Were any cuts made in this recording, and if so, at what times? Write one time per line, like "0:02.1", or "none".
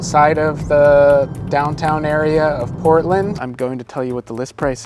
0:03.4